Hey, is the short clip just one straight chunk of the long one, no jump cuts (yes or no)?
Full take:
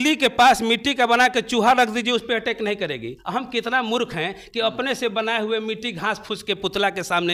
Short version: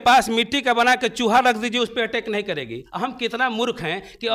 yes